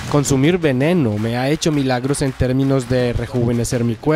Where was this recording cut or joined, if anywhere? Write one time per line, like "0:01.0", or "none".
none